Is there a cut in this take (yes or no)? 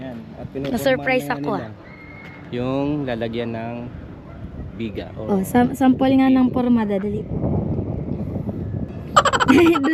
no